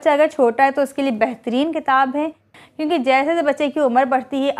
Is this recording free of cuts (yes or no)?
no